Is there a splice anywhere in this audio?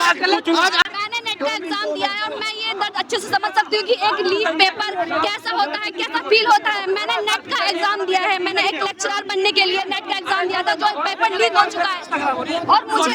yes; 1 cut; at 0.9 s

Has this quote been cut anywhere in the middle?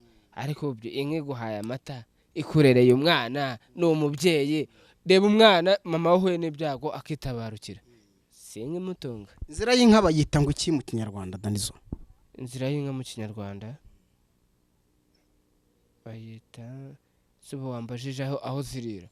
no; 0 cuts

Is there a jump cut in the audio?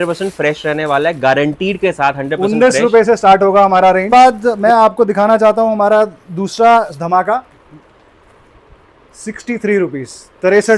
yes; 1 cut; at 4.1 s

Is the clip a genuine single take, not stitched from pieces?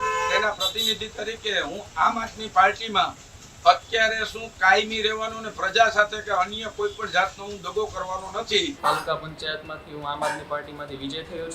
no; 1 cut; at 8.7 s

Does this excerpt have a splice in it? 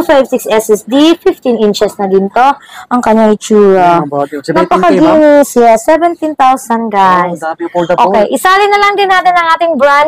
no; 0 cuts

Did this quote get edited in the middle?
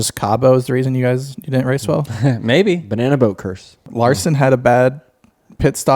yes; 1 cut; at 3.8 s

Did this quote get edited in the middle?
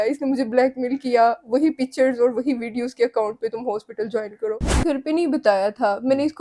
yes; 1 cut; at 4.8 s

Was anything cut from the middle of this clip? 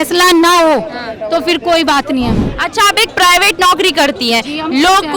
yes; 1 cut; at 2.4 s

